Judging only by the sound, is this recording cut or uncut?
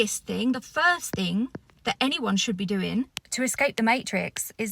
cut